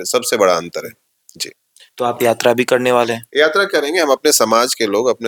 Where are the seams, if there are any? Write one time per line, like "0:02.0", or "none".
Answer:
none